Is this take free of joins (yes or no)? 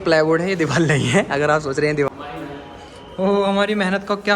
no